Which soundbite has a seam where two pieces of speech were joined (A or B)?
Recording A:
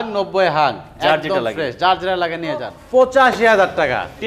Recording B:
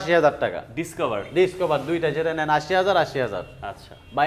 A